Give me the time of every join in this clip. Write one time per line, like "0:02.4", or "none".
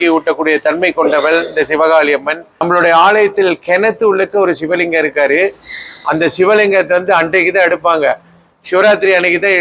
0:02.5

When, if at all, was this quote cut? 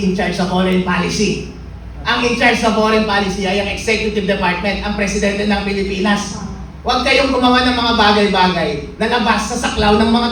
none

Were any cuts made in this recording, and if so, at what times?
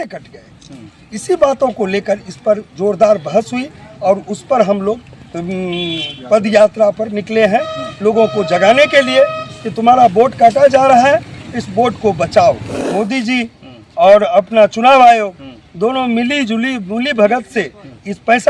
0:12.8

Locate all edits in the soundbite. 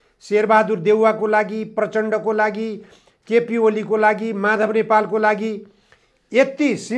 none

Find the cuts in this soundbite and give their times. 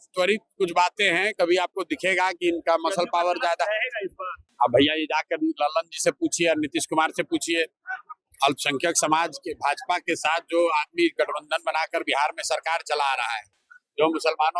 0:04.4

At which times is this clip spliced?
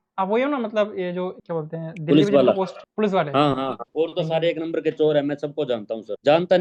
0:01.4
0:02.8
0:03.8

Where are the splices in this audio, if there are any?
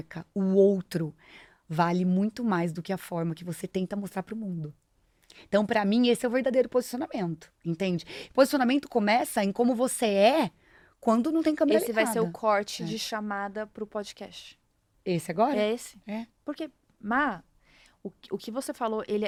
none

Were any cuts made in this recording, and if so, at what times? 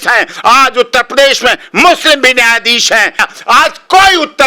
0:03.2

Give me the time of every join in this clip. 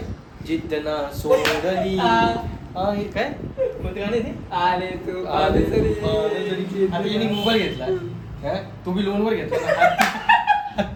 none

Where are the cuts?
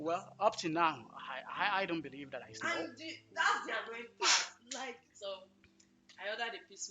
0:04.8

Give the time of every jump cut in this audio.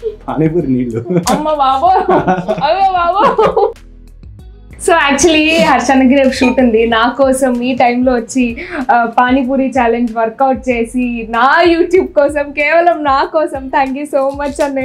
0:04.3

